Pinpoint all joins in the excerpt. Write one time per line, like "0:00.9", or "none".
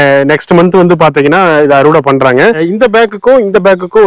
0:02.6